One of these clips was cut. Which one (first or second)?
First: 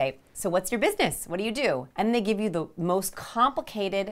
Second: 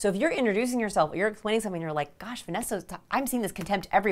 first